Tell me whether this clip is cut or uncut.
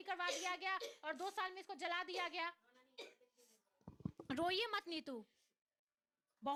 uncut